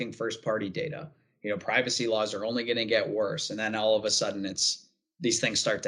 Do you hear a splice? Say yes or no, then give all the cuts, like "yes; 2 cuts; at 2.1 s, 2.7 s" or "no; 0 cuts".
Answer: no; 0 cuts